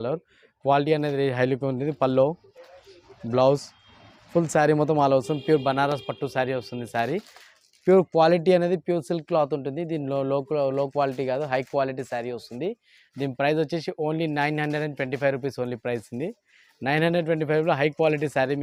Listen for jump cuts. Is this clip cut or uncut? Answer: uncut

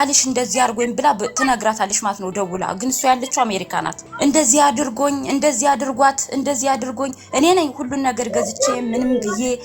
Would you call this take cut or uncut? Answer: cut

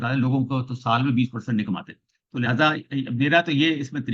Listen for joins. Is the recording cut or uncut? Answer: uncut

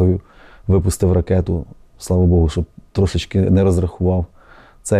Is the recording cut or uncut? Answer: uncut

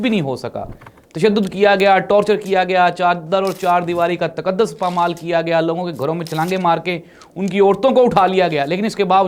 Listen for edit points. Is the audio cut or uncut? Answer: uncut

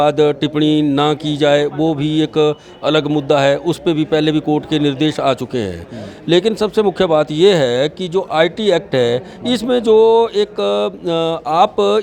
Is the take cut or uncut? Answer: uncut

